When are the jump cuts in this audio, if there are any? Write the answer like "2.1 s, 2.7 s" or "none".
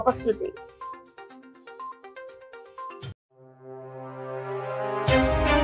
none